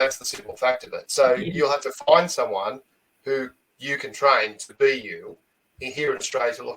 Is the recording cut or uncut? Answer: uncut